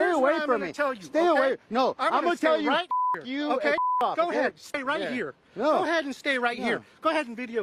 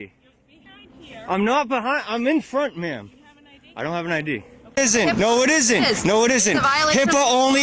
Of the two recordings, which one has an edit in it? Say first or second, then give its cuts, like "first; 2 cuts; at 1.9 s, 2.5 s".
second; 1 cut; at 4.8 s